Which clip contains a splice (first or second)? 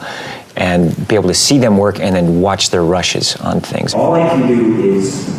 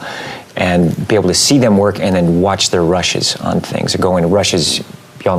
first